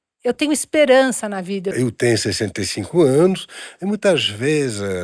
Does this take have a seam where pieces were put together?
yes; 1 cut; at 1.7 s

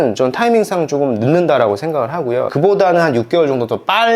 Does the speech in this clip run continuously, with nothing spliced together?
no; 1 cut; at 2.5 s

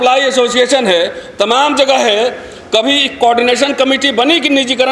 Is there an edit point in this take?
no; 0 cuts

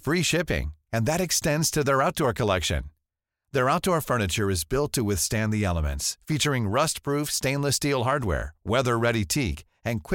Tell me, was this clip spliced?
no; 0 cuts

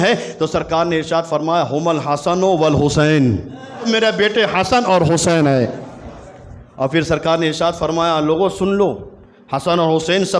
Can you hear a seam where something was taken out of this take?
yes; 1 cut; at 3.9 s

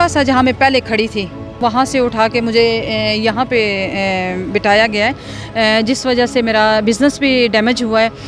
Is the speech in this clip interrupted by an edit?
yes; 1 cut; at 1.6 s

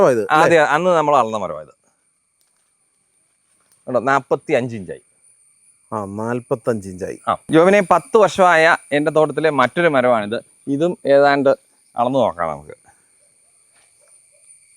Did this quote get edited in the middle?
yes; 1 cut; at 7.4 s

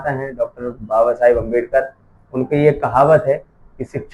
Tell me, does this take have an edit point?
no; 0 cuts

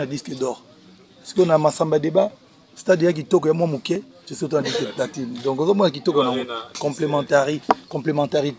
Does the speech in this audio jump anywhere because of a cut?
no; 0 cuts

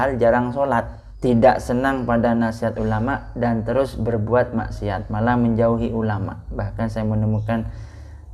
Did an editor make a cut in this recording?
yes; 1 cut; at 1.0 s

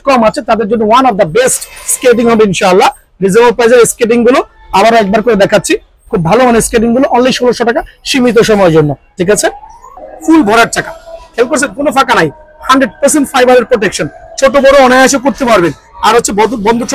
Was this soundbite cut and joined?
yes; 1 cut; at 10.1 s

